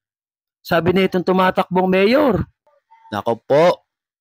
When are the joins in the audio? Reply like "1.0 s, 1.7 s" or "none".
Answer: 2.6 s